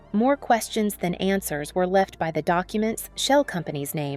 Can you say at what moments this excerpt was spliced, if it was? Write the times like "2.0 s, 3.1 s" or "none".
none